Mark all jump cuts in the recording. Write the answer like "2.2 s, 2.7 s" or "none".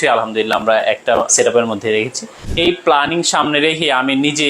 1.3 s, 2.4 s